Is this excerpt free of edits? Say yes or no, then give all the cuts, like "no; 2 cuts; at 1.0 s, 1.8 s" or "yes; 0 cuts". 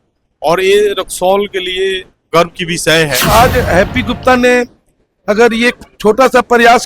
no; 1 cut; at 3.3 s